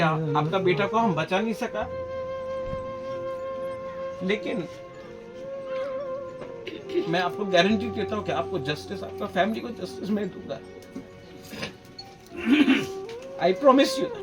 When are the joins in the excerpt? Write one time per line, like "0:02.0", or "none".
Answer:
none